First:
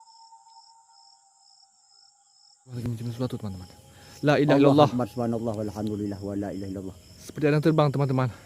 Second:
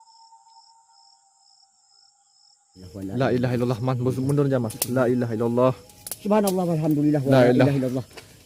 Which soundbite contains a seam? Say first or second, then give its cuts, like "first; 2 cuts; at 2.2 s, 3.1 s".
first; 1 cut; at 2.7 s